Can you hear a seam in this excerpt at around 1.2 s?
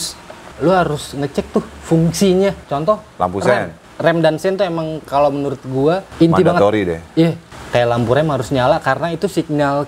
no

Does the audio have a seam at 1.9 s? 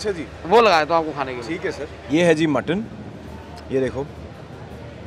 yes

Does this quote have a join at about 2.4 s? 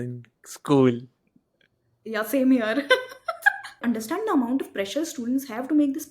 no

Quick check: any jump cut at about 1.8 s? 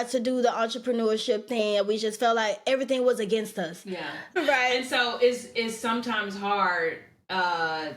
no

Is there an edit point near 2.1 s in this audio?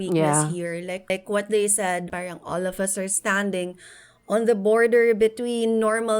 yes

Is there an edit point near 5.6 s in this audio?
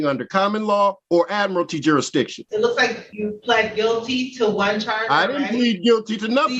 no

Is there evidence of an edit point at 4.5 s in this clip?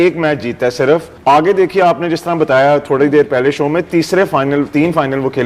no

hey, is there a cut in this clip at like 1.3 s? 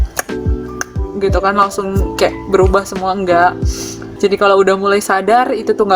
no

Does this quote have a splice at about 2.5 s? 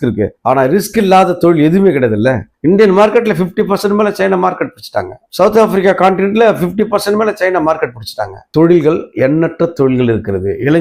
yes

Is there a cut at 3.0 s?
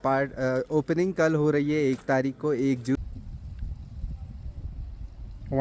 yes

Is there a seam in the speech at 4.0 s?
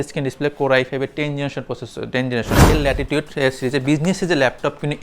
no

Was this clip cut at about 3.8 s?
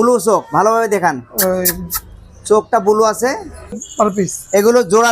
yes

